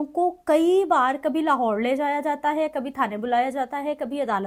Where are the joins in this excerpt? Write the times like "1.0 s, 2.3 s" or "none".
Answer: none